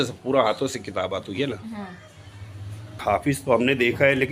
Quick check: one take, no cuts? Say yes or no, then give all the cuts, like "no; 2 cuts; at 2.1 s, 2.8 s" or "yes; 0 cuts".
no; 1 cut; at 3.0 s